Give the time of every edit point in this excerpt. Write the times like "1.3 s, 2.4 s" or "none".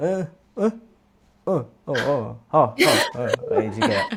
none